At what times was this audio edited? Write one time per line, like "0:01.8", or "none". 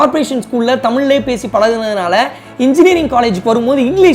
none

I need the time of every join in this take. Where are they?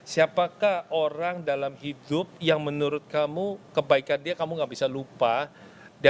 none

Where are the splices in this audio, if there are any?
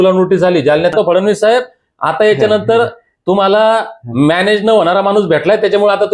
0:00.9

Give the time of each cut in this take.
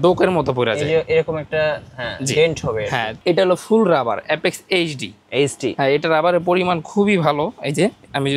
0:03.2
0:05.7

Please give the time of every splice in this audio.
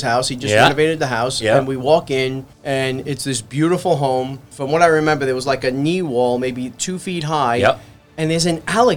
0:02.5
0:04.5

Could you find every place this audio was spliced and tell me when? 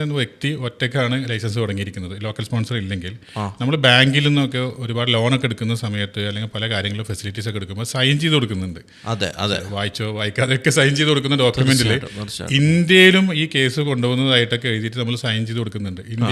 none

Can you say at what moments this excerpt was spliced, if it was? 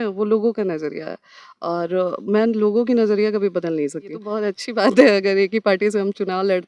0:04.3

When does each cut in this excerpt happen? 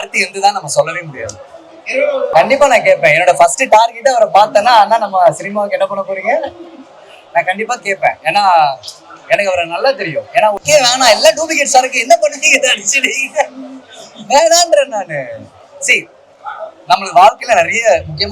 0:02.3
0:10.6

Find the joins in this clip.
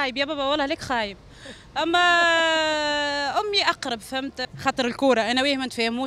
0:04.4

